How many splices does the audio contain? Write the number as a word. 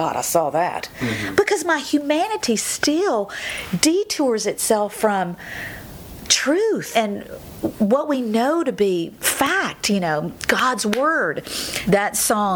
two